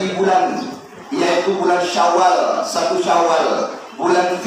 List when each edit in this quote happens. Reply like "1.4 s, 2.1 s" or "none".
none